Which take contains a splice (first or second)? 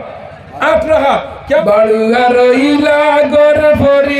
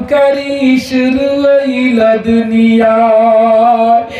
first